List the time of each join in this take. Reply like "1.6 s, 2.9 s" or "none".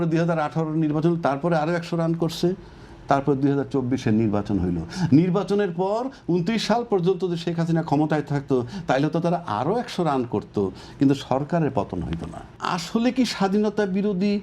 12.6 s